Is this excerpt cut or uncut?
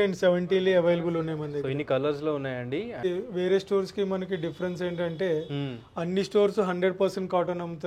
cut